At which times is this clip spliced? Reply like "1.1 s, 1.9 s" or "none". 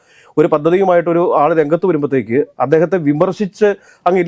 none